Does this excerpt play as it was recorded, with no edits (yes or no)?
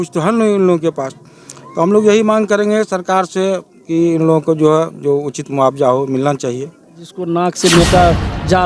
no